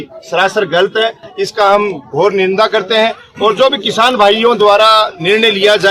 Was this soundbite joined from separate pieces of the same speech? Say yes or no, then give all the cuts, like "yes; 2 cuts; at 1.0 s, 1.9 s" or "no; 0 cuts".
no; 0 cuts